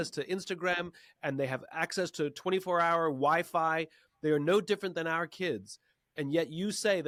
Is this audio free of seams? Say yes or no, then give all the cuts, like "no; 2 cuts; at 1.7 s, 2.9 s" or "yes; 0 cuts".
yes; 0 cuts